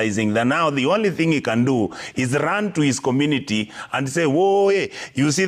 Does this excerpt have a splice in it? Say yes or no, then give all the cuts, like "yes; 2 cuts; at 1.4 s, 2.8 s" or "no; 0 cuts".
no; 0 cuts